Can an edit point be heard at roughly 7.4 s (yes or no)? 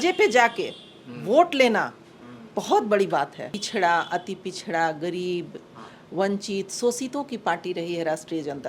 no